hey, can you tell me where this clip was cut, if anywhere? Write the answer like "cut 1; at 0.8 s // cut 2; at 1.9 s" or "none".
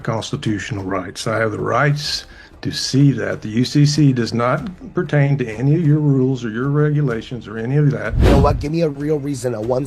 cut 1; at 8.3 s